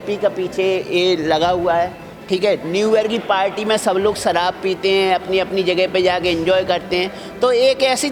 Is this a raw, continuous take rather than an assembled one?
yes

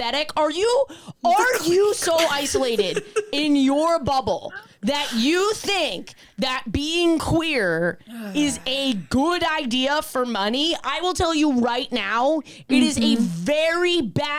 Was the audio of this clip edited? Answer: no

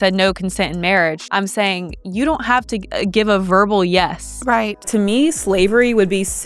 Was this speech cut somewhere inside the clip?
yes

